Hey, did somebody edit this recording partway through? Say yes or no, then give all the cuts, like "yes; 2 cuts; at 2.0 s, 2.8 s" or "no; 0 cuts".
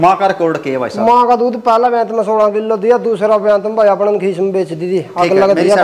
no; 0 cuts